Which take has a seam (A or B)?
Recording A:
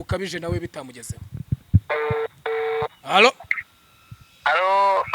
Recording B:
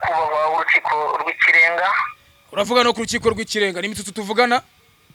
A